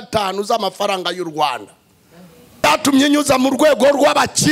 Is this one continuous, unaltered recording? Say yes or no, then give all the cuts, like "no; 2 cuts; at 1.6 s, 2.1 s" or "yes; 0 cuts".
no; 1 cut; at 2.6 s